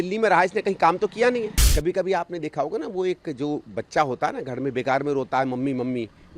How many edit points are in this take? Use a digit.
1